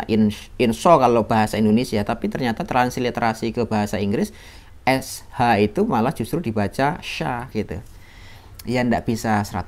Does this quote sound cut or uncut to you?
cut